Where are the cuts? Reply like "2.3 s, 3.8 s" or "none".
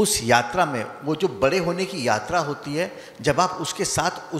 none